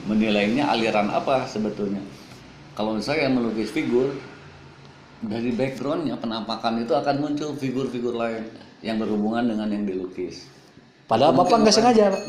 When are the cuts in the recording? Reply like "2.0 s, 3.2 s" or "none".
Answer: none